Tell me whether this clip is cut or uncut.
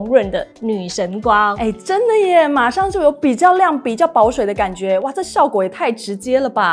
uncut